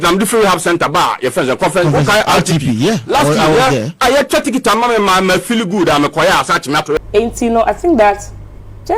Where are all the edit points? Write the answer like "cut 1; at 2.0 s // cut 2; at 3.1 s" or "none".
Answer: cut 1; at 7.0 s